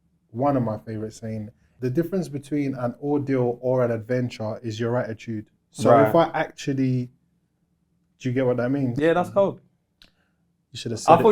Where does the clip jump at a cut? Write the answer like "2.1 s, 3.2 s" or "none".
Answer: 1.6 s